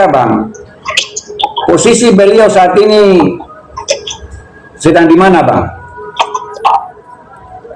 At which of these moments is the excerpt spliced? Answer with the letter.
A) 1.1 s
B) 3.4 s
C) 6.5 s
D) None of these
C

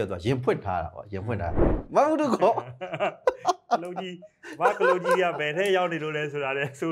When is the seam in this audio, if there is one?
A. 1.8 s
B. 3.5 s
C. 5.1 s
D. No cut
A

